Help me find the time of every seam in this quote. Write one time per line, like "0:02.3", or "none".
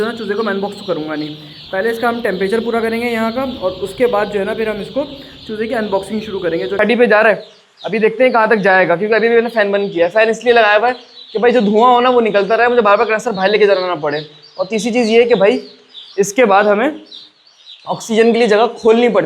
0:06.8